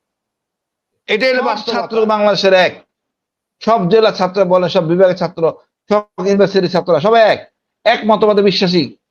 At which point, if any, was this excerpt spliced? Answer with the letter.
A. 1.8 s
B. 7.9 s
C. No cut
A